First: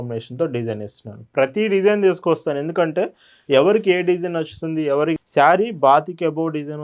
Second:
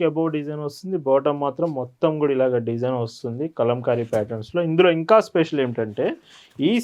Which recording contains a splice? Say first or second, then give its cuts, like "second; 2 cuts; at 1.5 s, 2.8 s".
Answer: first; 1 cut; at 5.2 s